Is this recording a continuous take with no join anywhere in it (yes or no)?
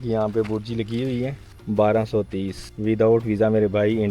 no